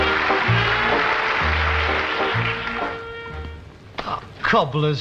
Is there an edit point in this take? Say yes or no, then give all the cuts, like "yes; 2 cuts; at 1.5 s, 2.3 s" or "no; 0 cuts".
yes; 1 cut; at 1.6 s